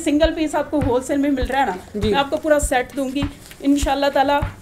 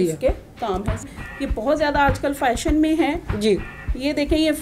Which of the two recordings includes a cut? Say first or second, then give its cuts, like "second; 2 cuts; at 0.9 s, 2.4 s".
second; 1 cut; at 1.0 s